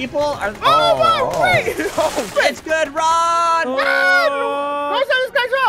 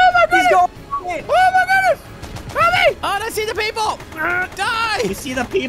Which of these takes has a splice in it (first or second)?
first